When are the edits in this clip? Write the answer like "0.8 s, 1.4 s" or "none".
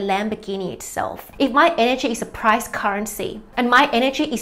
1.2 s